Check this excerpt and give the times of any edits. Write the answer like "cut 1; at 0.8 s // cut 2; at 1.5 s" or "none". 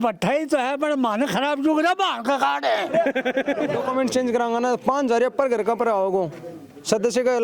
cut 1; at 3.8 s